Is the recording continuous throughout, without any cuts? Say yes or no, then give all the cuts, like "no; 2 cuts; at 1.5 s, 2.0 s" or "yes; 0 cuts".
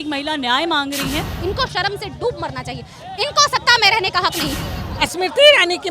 no; 2 cuts; at 1.3 s, 4.6 s